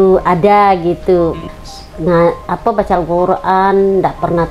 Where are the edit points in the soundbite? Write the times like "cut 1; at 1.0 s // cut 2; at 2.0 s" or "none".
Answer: cut 1; at 1.4 s